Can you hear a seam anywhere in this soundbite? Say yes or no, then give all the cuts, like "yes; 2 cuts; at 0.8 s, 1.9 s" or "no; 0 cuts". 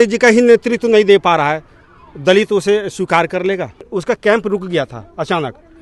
yes; 1 cut; at 3.8 s